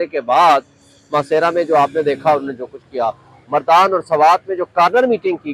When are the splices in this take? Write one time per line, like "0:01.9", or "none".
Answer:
none